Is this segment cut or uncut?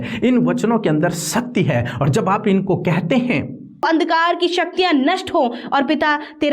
cut